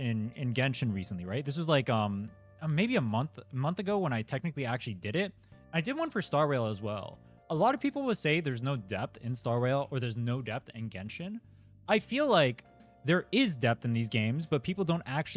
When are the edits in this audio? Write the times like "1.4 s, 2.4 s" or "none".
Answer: none